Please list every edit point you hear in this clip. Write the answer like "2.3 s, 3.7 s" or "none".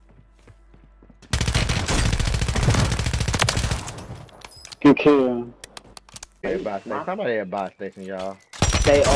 6.4 s